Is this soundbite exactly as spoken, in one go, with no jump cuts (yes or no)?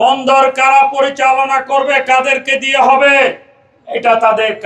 yes